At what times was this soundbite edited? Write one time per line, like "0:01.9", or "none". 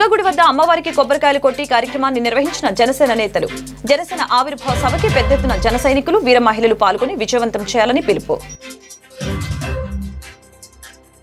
none